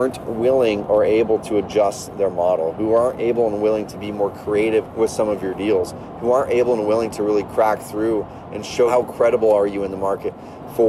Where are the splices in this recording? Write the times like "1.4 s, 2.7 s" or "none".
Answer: 4.9 s